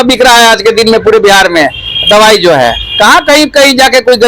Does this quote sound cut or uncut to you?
uncut